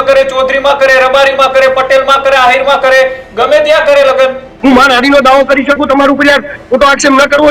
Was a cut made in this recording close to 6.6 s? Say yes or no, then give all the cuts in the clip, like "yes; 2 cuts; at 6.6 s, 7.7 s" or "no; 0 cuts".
no; 1 cut; at 4.5 s